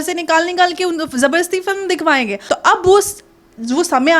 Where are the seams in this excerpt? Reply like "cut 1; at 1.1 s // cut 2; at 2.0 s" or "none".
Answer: cut 1; at 2.4 s

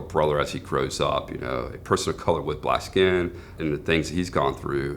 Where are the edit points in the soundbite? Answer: cut 1; at 3.5 s

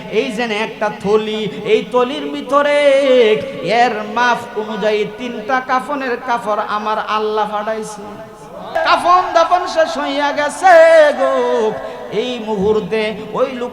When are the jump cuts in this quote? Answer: cut 1; at 8.8 s

